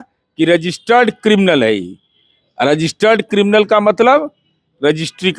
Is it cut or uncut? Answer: uncut